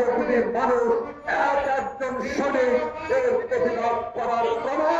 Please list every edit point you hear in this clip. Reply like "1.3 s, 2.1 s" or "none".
none